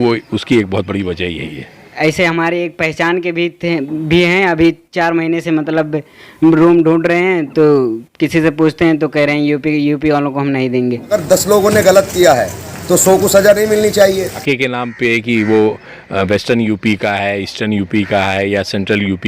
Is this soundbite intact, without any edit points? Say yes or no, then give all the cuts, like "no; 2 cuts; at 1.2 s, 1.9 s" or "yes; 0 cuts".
no; 3 cuts; at 1.9 s, 11.1 s, 14.4 s